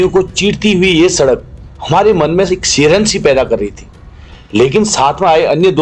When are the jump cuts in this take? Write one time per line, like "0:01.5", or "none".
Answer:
none